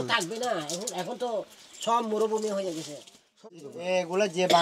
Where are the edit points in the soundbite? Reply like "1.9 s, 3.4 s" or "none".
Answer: 3.4 s